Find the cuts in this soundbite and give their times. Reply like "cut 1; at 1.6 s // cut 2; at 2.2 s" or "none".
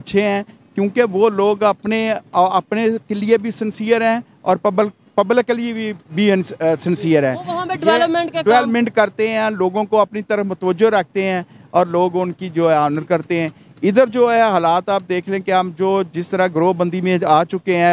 none